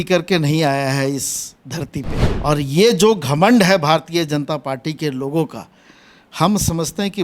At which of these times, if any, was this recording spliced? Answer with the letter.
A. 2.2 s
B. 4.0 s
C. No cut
A